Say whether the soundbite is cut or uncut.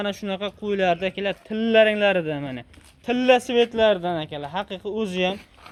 uncut